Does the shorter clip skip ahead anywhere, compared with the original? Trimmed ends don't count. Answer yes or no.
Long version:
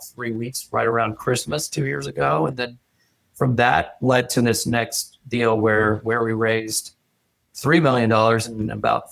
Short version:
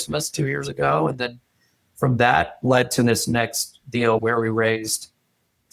yes